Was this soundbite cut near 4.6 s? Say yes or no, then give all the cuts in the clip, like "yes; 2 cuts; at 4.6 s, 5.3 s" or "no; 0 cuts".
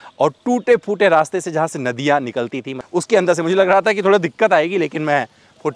no; 1 cut; at 2.7 s